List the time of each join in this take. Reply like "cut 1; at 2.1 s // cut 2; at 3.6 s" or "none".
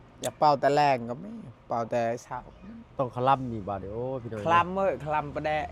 none